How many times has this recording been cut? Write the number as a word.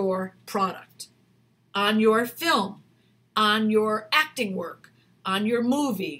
zero